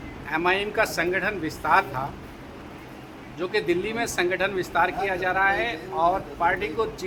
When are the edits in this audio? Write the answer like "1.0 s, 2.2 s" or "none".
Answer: none